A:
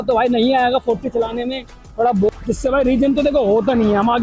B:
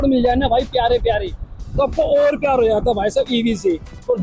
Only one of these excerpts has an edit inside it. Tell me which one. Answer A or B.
A